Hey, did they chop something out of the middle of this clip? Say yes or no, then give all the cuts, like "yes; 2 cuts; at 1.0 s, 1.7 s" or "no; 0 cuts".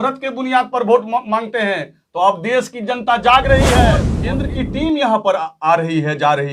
yes; 1 cut; at 4.1 s